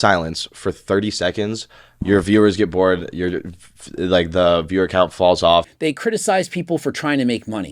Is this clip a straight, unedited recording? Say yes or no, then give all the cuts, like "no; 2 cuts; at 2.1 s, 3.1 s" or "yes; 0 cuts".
no; 1 cut; at 5.7 s